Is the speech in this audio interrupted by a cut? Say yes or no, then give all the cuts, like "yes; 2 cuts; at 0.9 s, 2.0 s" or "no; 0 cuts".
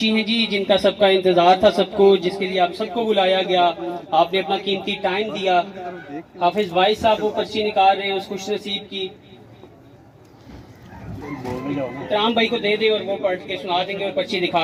no; 0 cuts